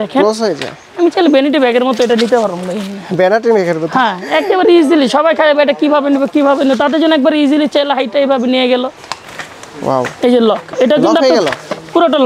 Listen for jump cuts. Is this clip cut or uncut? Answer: cut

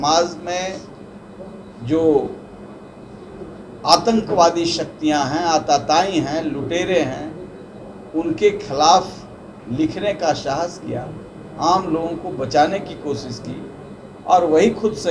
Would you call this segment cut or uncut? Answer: uncut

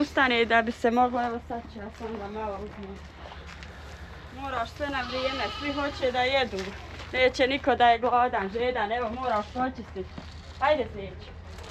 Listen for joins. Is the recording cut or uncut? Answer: uncut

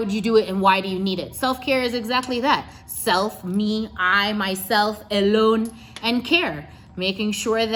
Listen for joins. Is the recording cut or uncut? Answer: uncut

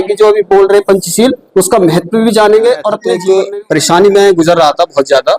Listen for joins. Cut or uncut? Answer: cut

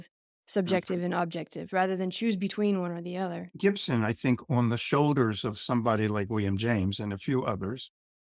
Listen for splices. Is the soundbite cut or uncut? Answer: cut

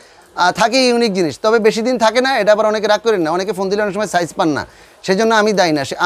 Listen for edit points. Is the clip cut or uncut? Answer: uncut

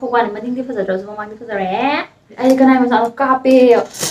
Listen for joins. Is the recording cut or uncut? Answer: cut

